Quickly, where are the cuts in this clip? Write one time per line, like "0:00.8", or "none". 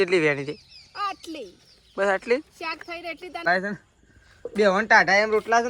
0:03.5